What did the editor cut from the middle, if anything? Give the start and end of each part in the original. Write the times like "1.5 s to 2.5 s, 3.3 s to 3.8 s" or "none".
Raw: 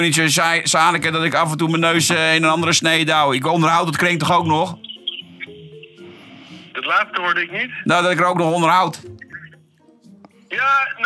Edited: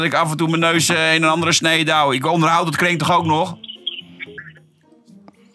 5.6 s to 9.3 s